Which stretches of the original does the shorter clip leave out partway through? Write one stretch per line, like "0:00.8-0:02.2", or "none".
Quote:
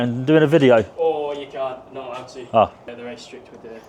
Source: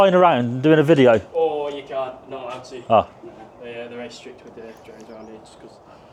0:03.2-0:03.8